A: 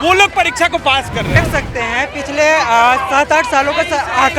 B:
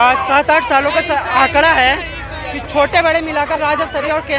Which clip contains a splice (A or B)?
A